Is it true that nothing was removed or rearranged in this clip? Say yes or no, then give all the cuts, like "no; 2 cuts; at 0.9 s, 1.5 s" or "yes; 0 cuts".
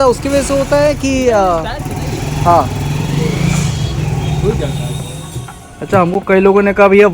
no; 1 cut; at 5.1 s